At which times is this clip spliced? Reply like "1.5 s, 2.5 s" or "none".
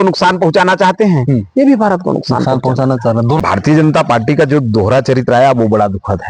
3.4 s